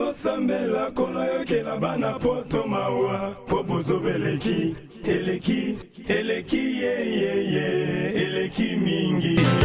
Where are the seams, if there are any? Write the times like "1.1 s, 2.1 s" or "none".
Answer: none